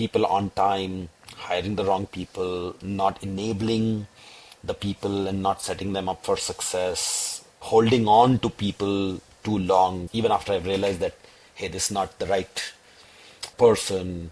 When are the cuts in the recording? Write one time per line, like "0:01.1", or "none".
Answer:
0:10.0